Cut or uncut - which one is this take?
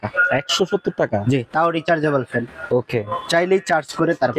uncut